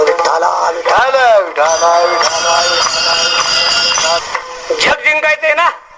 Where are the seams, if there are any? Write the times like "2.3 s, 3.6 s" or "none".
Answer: 4.2 s